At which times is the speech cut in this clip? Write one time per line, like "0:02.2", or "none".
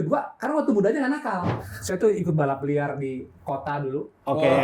0:01.5